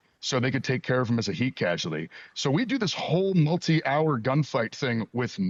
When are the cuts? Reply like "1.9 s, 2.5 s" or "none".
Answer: none